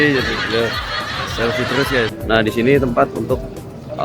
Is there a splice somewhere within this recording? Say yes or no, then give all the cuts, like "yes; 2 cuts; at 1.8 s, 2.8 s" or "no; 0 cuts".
yes; 1 cut; at 2.2 s